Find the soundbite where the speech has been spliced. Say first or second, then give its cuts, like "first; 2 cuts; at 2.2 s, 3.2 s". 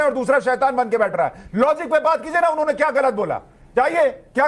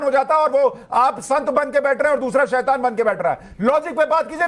first; 1 cut; at 3.6 s